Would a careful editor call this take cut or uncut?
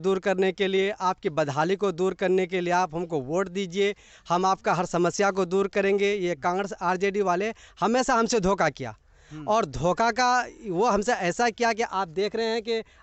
uncut